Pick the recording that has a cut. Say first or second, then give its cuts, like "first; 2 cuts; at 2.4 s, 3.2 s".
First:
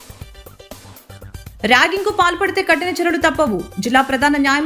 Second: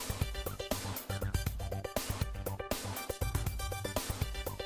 first; 1 cut; at 1.5 s